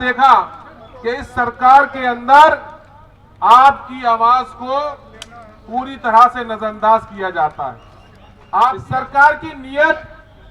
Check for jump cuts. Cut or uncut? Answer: cut